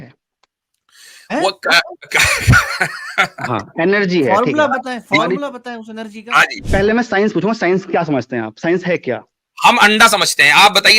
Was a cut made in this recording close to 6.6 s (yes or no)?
yes